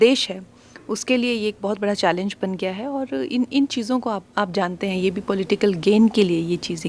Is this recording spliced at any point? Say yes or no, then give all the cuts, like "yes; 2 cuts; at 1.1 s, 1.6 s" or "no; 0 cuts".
no; 0 cuts